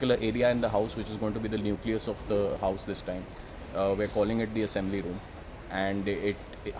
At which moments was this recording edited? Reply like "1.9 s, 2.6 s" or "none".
none